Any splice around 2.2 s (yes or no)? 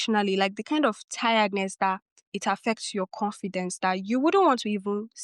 no